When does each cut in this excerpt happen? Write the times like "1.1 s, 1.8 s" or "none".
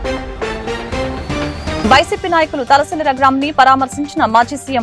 1.8 s